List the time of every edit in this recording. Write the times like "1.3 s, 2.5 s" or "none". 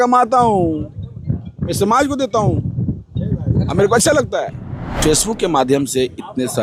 5.0 s